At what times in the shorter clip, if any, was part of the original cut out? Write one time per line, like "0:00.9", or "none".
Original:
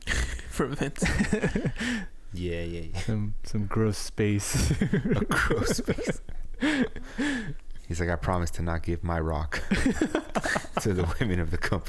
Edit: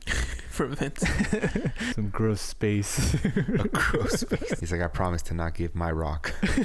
0:01.9
0:04.6